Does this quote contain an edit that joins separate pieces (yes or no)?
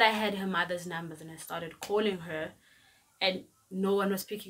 no